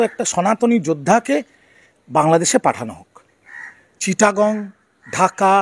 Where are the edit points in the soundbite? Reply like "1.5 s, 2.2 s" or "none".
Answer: none